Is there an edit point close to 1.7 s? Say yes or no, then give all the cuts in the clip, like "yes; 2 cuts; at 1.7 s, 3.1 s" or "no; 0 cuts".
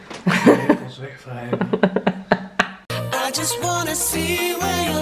no; 1 cut; at 3.0 s